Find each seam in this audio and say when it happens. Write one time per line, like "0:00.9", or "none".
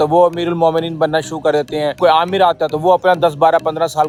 none